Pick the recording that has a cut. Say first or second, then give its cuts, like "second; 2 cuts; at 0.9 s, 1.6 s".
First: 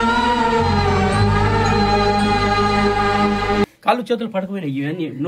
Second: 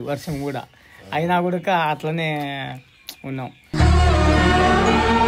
first; 1 cut; at 3.7 s